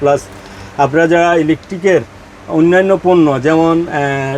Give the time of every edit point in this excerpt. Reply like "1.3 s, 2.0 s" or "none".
none

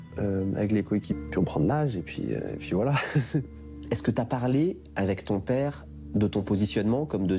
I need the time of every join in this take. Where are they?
none

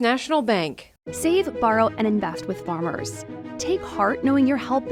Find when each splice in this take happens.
none

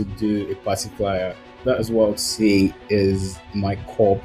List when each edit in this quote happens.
1.5 s

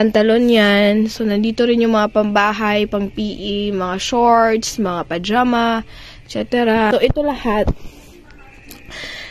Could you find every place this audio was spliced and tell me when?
6.9 s

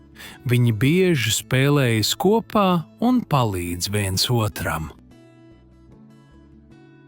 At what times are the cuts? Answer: 5.0 s

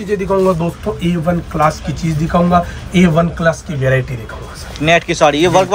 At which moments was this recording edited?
none

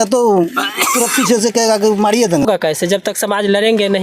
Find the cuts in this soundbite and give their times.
2.4 s

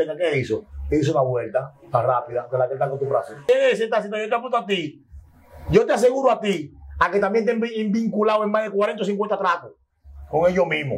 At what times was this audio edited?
3.5 s

